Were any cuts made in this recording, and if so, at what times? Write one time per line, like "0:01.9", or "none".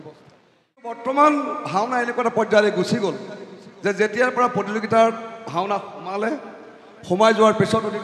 0:01.0